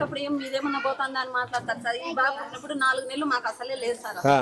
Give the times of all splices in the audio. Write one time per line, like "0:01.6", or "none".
none